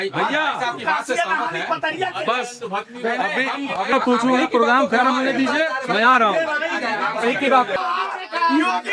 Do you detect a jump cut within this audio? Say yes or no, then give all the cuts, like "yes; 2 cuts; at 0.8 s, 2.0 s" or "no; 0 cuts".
yes; 2 cuts; at 3.9 s, 7.8 s